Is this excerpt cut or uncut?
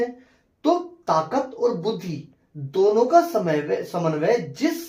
uncut